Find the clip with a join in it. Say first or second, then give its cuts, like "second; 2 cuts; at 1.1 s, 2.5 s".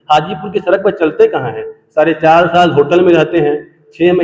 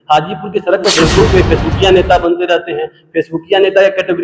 second; 1 cut; at 1.0 s